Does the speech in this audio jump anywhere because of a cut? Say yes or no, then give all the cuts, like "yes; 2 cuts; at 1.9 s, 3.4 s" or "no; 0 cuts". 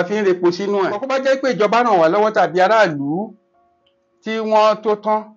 yes; 1 cut; at 1.0 s